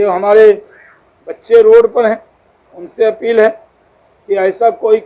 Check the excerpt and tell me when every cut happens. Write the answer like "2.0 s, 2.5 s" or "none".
none